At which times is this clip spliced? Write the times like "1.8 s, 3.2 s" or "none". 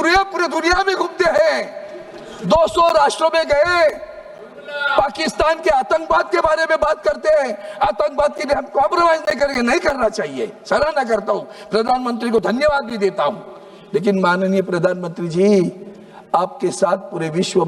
none